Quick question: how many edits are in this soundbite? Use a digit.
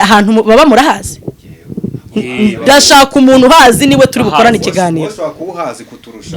0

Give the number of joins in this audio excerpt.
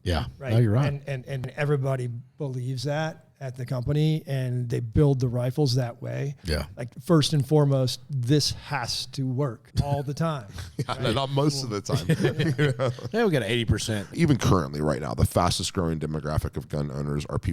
3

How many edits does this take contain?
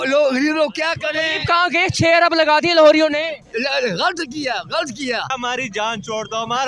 1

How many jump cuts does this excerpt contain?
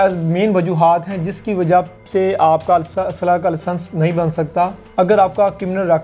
1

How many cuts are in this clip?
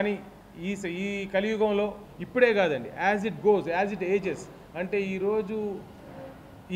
1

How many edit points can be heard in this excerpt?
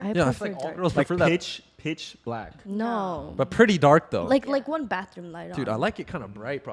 0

